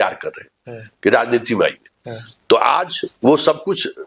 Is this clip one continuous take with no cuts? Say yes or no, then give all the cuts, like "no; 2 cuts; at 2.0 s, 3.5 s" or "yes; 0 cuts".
yes; 0 cuts